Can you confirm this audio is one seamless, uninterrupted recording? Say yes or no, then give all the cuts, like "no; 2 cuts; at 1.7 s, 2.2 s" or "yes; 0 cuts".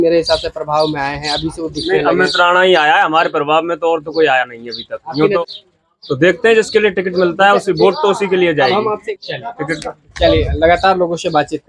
yes; 0 cuts